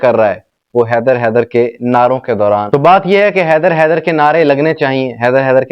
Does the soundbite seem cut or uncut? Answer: cut